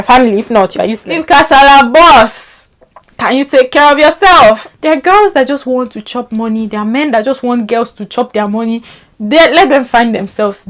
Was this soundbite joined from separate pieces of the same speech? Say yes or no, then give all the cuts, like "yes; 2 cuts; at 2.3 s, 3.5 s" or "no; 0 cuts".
yes; 2 cuts; at 1.1 s, 4.6 s